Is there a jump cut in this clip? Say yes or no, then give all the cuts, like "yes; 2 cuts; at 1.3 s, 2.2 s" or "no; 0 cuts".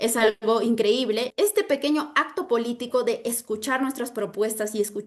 yes; 1 cut; at 1.3 s